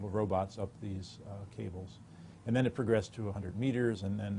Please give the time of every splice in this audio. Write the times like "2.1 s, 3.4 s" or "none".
2.6 s